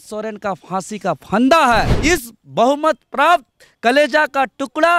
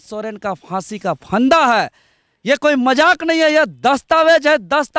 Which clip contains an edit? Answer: first; 1 cut; at 1.9 s

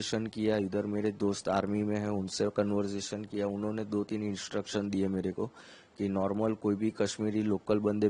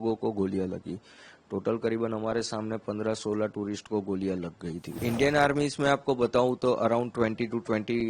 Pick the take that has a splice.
second; 1 cut; at 5.0 s

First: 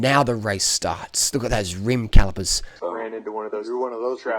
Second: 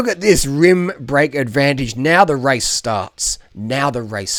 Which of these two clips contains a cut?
first; 1 cut; at 2.6 s

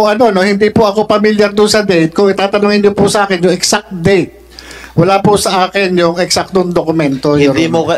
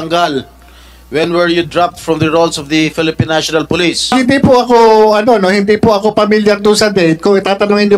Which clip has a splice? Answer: second; 1 cut; at 4.1 s

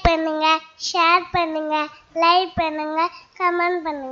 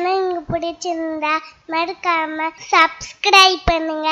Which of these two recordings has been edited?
second; 1 cut; at 2.6 s

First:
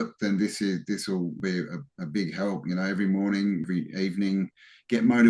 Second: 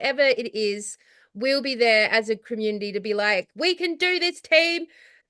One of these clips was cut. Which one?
first; 2 cuts; at 1.4 s, 3.6 s

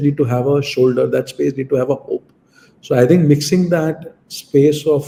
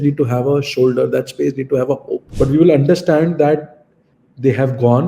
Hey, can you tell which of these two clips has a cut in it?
second; 1 cut; at 2.2 s

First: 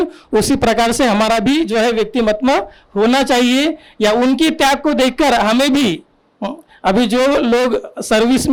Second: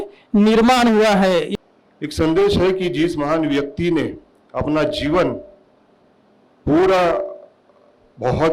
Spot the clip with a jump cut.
second; 1 cut; at 1.6 s

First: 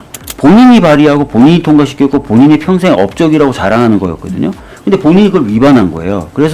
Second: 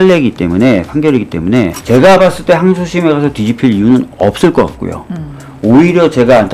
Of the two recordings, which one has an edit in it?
second; 1 cut; at 1.8 s

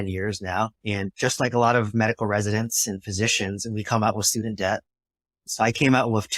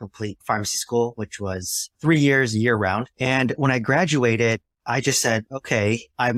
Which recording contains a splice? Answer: first; 1 cut; at 1.0 s

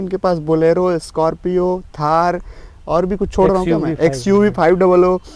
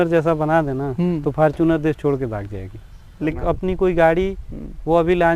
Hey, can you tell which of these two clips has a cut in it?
second; 1 cut; at 3.3 s

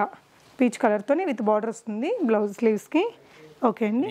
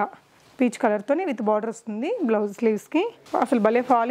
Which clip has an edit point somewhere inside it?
second; 1 cut; at 3.2 s

